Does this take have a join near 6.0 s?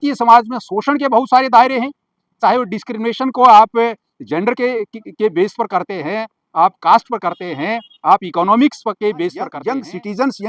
no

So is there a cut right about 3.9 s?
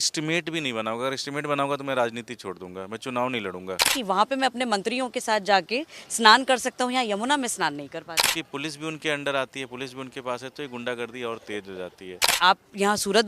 yes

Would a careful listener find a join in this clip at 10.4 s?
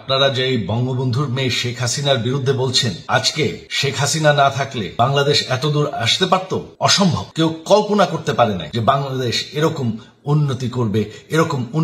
no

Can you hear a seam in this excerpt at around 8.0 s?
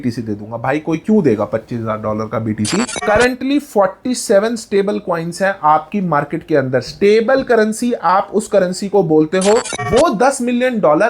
no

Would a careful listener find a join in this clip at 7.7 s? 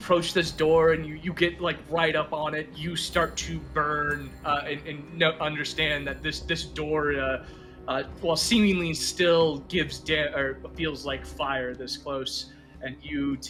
no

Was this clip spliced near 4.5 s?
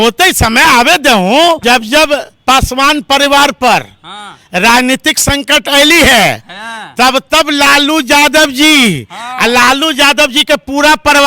no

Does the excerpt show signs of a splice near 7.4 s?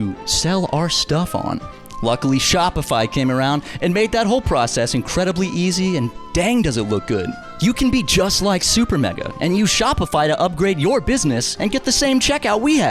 yes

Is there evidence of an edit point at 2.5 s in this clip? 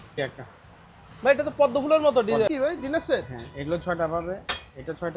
yes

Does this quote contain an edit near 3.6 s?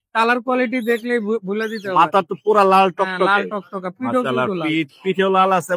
no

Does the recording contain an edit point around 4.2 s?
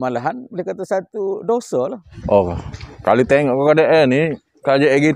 no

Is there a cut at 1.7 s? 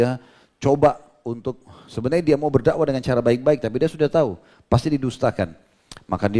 no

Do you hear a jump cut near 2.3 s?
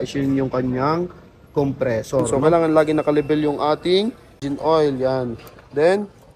yes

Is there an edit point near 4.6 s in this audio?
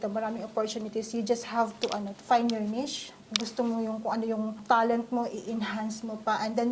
yes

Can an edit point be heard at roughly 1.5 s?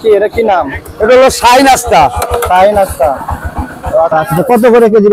no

